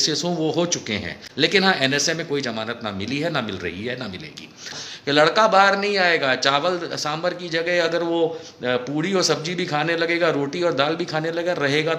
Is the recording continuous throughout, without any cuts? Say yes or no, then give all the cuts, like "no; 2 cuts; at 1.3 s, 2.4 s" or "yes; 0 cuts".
no; 2 cuts; at 1.2 s, 4.9 s